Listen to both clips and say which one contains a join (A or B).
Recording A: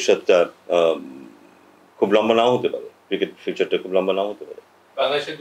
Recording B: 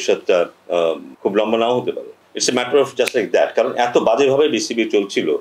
B